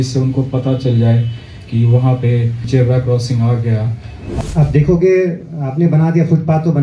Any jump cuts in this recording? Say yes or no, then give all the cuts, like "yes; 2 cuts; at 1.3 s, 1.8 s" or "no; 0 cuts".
yes; 2 cuts; at 2.6 s, 4.4 s